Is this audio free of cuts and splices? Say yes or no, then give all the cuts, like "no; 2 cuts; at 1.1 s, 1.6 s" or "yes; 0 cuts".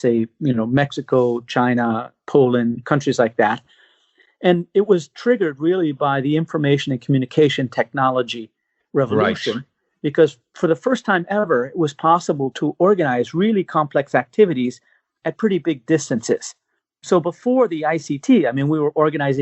no; 1 cut; at 10.5 s